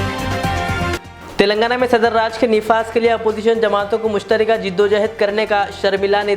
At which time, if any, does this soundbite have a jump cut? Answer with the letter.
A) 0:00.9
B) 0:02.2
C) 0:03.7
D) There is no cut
A